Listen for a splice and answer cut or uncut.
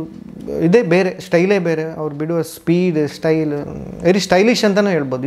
uncut